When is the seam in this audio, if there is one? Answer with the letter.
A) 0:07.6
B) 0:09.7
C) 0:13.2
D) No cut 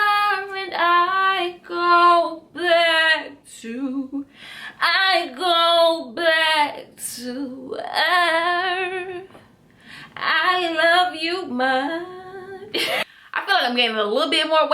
C